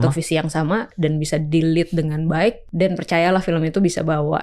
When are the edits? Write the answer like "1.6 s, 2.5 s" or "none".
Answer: 2.6 s